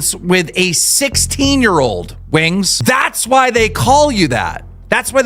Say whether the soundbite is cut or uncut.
cut